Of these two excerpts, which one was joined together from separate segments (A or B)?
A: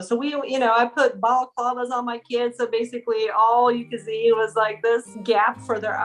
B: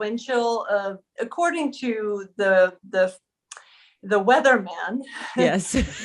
A